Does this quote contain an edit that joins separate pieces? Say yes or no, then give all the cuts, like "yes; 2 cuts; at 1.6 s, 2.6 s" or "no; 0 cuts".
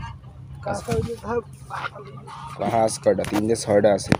no; 0 cuts